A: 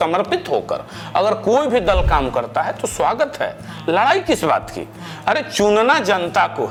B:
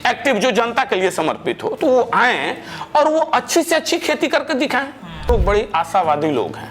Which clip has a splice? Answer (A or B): B